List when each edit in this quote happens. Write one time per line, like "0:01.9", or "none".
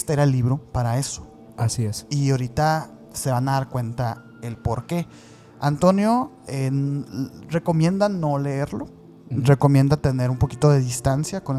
none